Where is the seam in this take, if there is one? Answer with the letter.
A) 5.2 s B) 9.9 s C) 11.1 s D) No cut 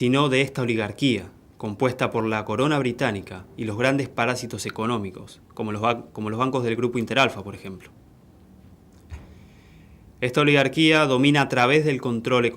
A